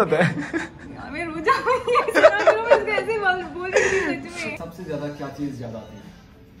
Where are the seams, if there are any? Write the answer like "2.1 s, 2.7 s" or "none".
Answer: 4.7 s